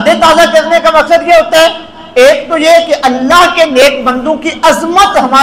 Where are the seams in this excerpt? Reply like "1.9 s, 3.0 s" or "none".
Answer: none